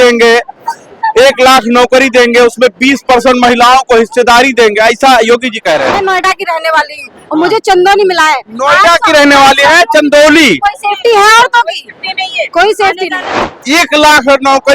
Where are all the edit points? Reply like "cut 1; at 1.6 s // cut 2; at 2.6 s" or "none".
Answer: cut 1; at 6.0 s // cut 2; at 13.6 s